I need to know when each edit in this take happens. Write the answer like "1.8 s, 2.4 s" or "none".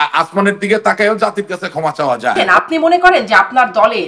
2.3 s